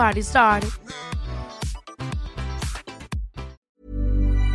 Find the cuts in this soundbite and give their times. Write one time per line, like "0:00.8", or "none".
0:03.5